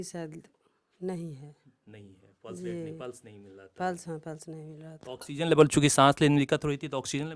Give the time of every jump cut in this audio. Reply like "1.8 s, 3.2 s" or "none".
none